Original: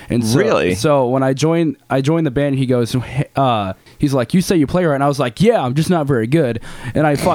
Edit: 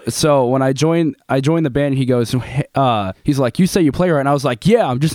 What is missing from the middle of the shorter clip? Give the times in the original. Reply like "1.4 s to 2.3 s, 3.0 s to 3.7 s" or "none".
3.7 s to 3.9 s